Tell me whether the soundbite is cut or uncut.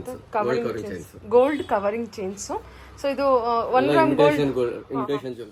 uncut